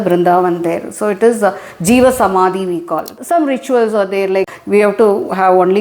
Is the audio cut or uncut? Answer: cut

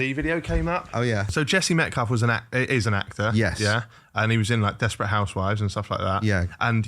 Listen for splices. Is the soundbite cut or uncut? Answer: cut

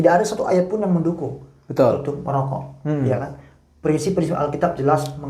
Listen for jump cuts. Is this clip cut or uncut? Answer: uncut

